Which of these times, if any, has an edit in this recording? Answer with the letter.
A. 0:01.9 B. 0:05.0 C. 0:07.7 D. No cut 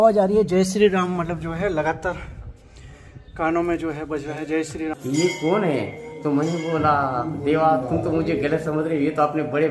B